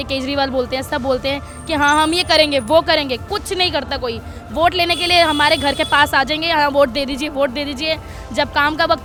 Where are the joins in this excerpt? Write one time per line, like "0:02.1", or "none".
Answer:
none